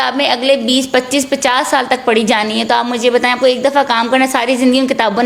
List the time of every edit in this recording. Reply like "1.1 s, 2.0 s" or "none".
none